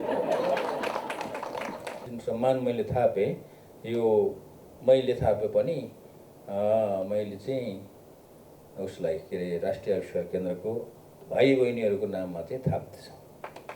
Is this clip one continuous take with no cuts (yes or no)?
no